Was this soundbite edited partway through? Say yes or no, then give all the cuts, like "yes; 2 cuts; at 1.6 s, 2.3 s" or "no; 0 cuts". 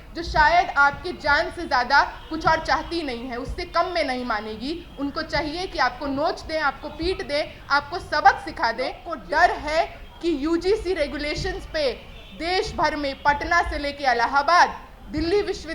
yes; 1 cut; at 9.1 s